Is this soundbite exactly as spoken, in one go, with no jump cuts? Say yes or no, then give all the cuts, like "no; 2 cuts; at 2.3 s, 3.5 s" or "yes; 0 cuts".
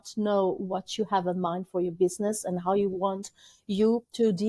yes; 0 cuts